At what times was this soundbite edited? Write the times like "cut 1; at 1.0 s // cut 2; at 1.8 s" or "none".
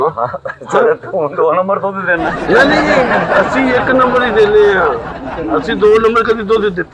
none